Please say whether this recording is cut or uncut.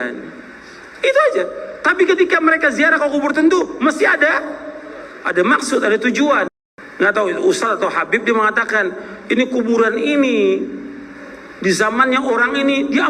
cut